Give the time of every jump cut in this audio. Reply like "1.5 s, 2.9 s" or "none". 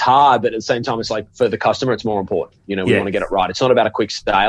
1.3 s